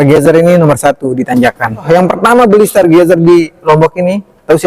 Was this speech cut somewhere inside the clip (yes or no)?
yes